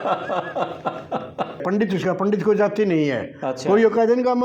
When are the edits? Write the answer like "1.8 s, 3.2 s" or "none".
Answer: 1.6 s